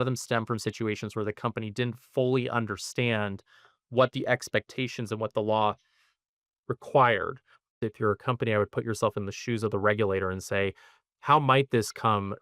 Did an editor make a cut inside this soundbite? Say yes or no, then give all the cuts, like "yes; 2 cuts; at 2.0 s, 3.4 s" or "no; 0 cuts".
yes; 1 cut; at 7.9 s